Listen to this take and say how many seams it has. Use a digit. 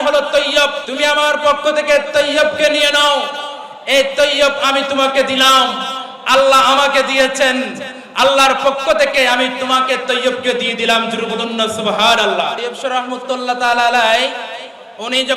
2